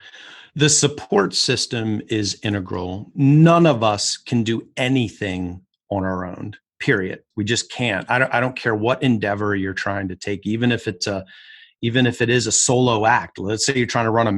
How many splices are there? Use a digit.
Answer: 2